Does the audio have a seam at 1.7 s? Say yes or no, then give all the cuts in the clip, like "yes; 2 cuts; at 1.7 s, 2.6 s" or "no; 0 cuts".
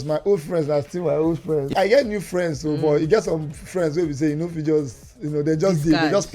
yes; 1 cut; at 1.7 s